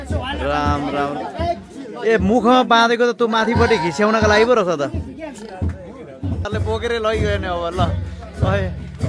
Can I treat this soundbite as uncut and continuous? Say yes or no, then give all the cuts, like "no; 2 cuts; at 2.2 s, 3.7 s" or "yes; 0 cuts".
no; 1 cut; at 6.5 s